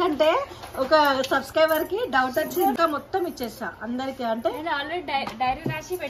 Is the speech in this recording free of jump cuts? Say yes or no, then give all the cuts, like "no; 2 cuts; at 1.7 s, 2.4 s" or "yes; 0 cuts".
no; 1 cut; at 2.7 s